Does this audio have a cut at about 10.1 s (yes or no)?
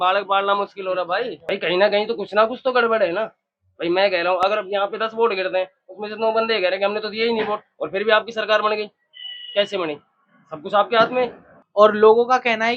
no